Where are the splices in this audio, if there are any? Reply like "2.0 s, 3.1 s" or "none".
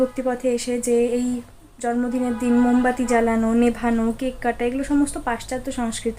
none

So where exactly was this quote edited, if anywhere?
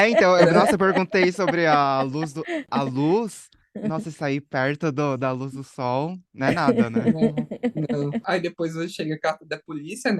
2.6 s, 8.2 s

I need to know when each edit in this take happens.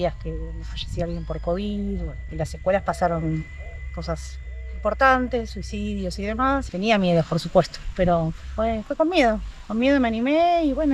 2.2 s, 6.7 s

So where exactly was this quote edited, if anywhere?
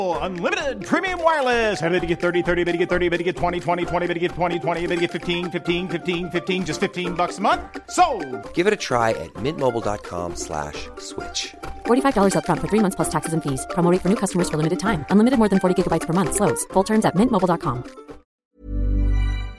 18.5 s

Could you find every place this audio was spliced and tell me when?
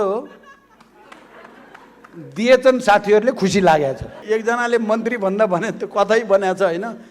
4.3 s

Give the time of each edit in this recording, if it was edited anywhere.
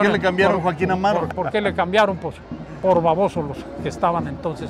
1.3 s

